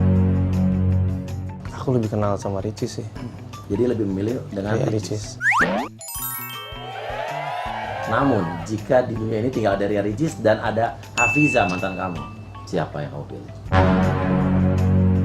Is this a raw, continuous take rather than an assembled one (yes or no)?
yes